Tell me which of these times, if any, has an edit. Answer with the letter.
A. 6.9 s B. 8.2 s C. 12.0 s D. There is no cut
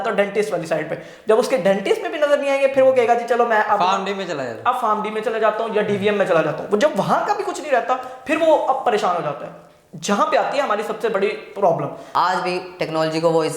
C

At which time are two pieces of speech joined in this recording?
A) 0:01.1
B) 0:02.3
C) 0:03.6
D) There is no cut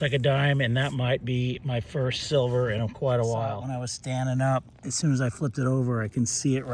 C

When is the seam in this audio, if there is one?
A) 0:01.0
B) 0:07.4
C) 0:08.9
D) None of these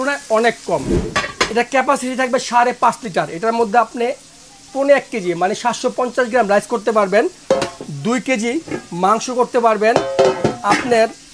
A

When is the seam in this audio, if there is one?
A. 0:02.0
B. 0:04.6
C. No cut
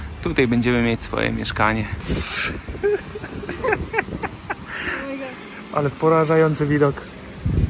A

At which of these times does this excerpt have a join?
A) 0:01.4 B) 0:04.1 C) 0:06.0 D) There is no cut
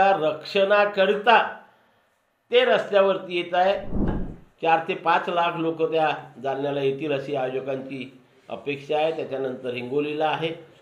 B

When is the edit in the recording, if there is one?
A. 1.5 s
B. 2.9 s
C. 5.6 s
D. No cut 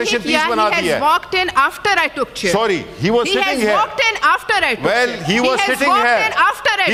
D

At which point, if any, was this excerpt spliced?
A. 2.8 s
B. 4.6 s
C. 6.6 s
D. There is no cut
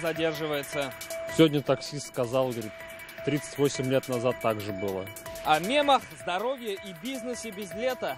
D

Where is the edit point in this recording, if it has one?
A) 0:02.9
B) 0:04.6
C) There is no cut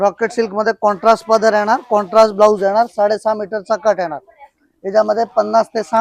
C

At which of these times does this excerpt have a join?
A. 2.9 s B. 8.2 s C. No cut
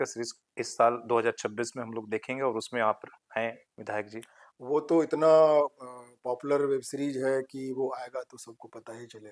C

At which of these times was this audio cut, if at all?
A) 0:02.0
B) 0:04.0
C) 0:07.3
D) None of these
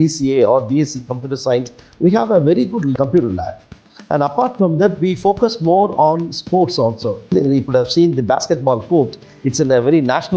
C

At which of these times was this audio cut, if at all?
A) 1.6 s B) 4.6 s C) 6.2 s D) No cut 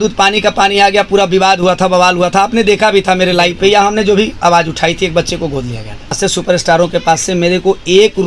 C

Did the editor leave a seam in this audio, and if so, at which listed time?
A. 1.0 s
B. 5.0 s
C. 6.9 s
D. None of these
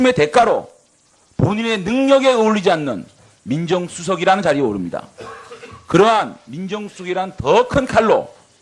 D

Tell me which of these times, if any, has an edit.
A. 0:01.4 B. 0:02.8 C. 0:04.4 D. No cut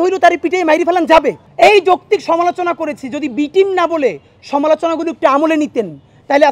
A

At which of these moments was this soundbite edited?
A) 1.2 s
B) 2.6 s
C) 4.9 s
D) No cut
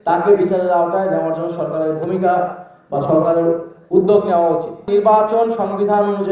C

